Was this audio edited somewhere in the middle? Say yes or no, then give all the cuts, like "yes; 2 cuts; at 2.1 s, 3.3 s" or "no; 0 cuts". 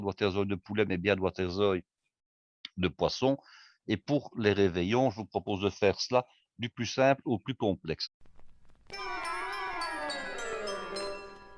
yes; 1 cut; at 8.0 s